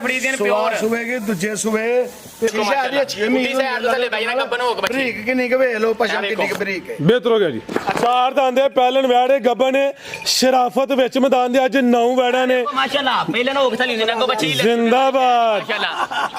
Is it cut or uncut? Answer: cut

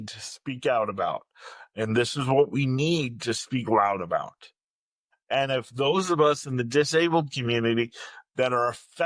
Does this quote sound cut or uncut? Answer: uncut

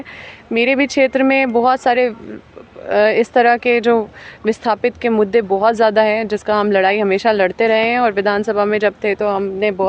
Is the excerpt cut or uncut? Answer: uncut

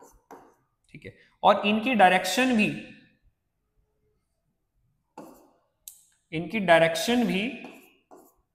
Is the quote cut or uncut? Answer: uncut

